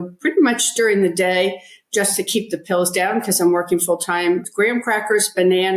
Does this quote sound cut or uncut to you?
cut